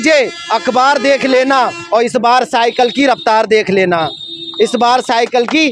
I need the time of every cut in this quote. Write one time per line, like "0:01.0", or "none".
none